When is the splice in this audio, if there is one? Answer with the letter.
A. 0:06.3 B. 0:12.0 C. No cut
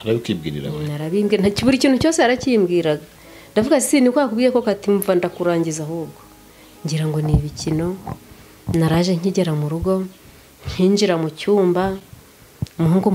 C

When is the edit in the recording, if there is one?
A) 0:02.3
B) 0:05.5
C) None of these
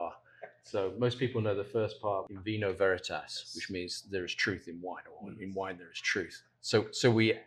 A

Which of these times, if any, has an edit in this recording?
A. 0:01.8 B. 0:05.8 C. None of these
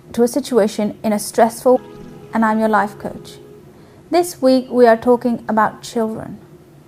C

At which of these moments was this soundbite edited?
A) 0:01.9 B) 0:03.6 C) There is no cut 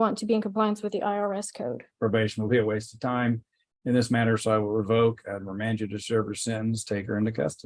A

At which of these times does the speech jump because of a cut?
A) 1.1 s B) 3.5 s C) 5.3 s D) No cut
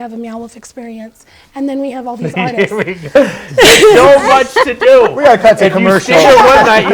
D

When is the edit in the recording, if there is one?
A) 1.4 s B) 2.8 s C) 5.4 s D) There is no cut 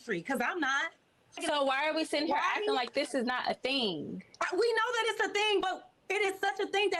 A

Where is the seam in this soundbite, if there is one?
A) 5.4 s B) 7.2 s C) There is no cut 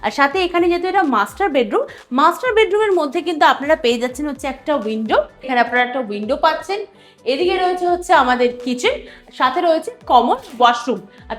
A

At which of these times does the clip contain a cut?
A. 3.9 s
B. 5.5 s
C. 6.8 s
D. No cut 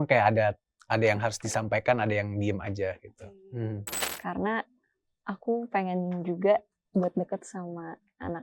A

